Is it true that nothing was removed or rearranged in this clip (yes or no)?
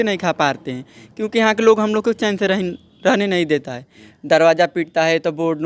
yes